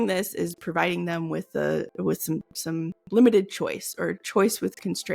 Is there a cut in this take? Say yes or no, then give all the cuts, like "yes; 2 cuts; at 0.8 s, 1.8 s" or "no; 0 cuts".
no; 0 cuts